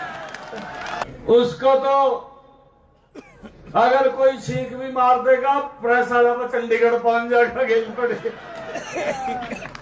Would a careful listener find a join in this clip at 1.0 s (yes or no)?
yes